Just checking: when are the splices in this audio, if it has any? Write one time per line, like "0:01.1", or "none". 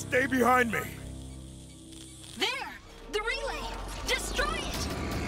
0:00.9
0:02.3